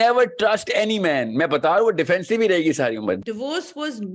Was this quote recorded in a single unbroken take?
no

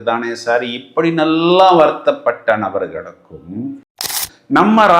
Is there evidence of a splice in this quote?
yes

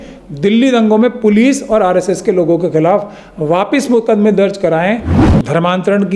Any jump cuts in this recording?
yes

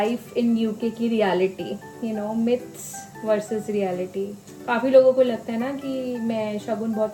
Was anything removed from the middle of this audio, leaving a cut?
no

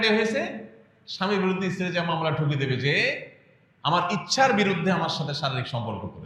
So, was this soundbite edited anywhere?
no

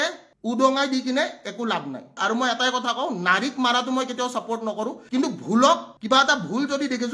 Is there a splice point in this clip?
yes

